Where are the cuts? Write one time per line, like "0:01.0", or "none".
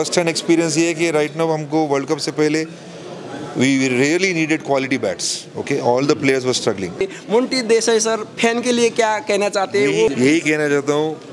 0:07.0
0:10.1